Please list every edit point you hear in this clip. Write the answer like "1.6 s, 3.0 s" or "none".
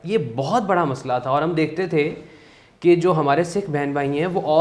none